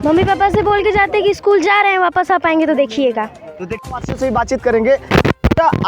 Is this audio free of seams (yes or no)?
yes